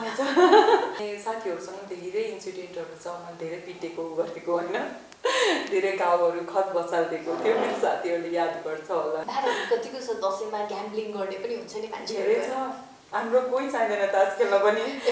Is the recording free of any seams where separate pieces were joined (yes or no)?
no